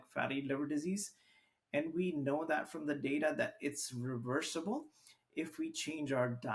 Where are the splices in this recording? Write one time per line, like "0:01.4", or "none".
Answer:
none